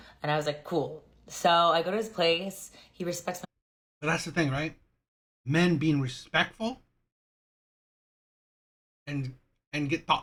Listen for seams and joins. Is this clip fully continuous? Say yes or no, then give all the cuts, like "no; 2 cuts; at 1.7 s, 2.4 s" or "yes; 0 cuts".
yes; 0 cuts